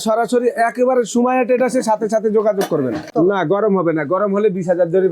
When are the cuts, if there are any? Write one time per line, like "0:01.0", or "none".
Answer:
0:03.1